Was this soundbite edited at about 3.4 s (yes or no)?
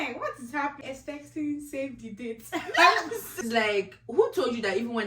yes